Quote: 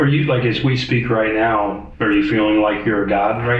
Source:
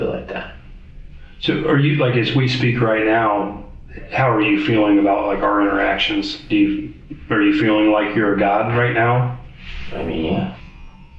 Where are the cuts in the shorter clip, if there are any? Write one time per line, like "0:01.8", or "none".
0:01.9